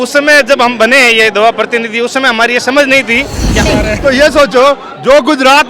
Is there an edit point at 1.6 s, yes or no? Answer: no